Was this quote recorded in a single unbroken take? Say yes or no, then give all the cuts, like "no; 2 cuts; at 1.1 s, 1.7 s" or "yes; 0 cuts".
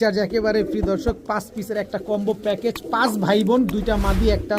yes; 0 cuts